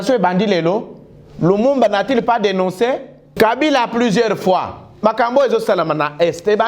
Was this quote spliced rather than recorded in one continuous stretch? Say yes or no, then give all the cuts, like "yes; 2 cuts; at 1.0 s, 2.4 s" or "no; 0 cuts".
yes; 1 cut; at 3.3 s